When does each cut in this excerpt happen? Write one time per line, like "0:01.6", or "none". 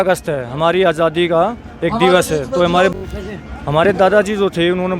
0:02.9